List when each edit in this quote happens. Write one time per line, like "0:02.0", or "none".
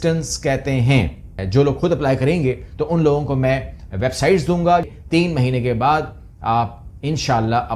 0:01.4
0:05.0